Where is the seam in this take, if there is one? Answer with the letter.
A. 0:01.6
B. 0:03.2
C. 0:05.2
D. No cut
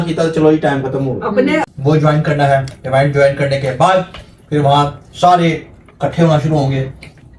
A